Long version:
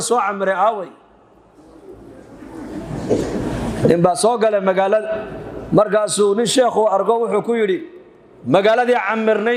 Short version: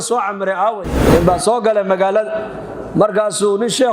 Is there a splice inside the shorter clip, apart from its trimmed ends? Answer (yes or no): yes